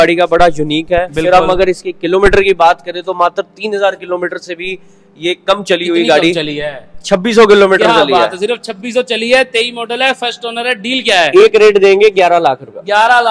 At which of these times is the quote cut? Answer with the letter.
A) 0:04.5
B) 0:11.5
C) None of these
C